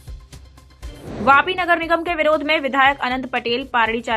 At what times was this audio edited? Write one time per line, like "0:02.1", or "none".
none